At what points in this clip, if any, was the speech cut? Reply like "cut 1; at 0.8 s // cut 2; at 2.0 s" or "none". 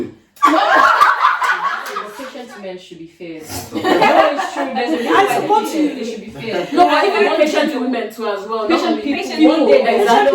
cut 1; at 2.1 s